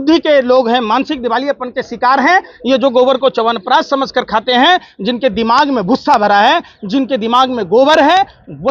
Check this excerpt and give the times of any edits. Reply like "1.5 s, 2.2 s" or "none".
none